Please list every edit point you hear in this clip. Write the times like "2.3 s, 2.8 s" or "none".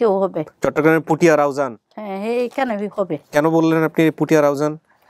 none

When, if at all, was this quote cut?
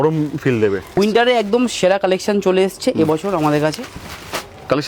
1.0 s

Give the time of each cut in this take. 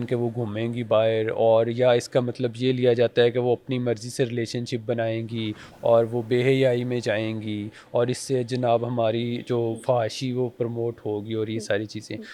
none

